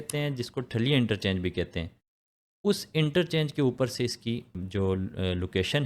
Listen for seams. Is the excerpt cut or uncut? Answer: cut